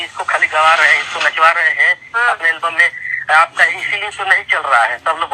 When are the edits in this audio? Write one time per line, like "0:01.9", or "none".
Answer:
none